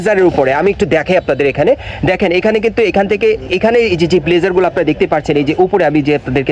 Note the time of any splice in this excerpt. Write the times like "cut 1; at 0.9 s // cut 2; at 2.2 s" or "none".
none